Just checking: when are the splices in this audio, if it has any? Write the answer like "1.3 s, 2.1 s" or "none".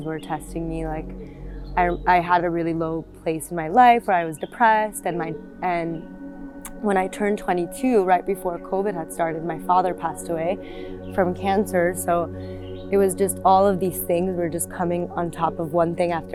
none